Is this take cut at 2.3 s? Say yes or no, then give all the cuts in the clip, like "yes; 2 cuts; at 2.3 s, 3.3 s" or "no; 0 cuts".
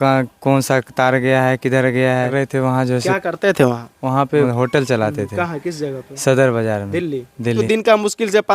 yes; 3 cuts; at 2.3 s, 4.5 s, 7.6 s